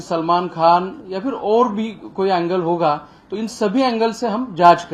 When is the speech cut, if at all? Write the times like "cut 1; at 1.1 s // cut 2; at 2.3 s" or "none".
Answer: none

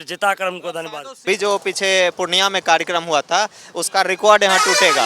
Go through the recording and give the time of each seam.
cut 1; at 1.2 s

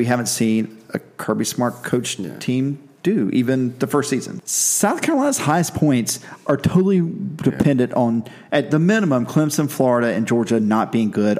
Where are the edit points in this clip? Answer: cut 1; at 4.4 s

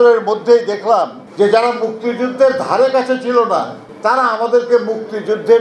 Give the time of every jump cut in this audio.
cut 1; at 1.2 s // cut 2; at 3.8 s

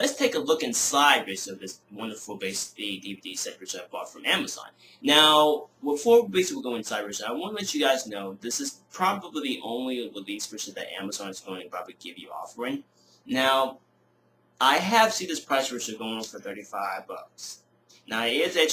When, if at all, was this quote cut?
none

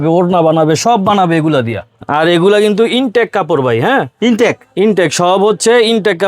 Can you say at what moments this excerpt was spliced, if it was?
cut 1; at 2.0 s

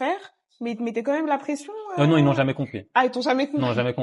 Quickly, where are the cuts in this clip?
none

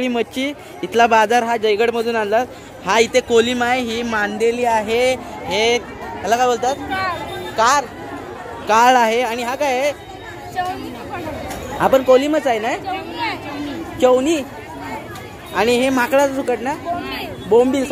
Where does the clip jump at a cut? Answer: none

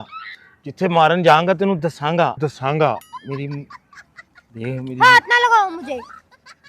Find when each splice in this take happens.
cut 1; at 3.2 s

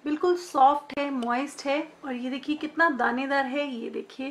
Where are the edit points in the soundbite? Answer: cut 1; at 2.0 s

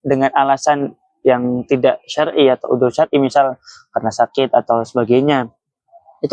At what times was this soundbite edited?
none

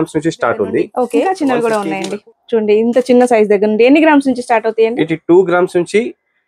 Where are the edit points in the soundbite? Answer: cut 1; at 1.2 s

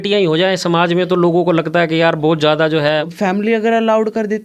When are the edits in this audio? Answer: cut 1; at 3.1 s

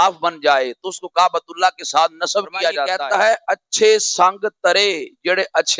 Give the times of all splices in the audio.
cut 1; at 2.9 s

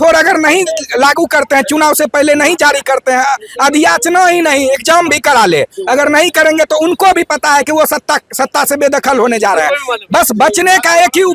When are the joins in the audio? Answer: none

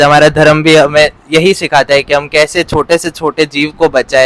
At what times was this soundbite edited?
none

